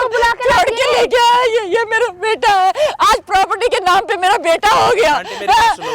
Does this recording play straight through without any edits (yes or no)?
yes